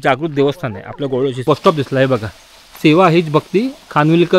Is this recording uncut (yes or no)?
no